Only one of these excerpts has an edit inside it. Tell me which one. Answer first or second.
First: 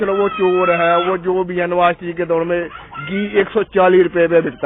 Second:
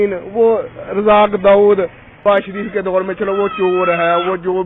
second